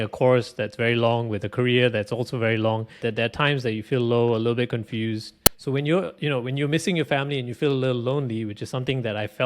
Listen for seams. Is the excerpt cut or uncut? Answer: cut